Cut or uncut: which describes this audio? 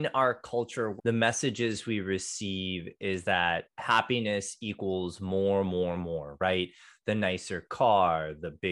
cut